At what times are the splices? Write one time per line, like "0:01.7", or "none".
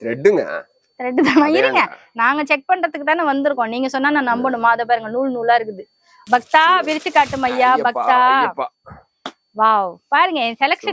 0:06.1